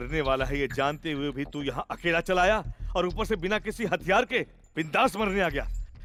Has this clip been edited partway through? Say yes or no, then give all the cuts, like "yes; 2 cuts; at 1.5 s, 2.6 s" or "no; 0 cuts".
no; 0 cuts